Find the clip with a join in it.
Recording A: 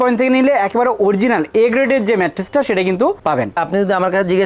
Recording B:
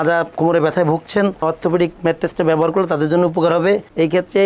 A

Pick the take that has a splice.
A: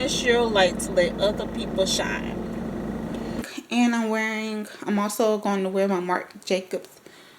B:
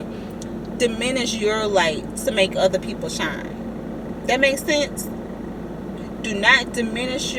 A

